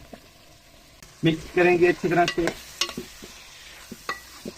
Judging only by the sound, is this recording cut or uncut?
uncut